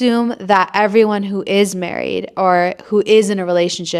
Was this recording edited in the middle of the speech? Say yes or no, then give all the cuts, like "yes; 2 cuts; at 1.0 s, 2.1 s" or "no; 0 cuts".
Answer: no; 0 cuts